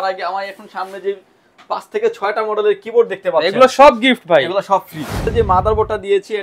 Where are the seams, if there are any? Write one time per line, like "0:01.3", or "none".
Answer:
0:05.2